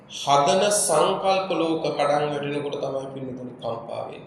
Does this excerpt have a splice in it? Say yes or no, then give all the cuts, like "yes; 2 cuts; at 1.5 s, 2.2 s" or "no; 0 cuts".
no; 0 cuts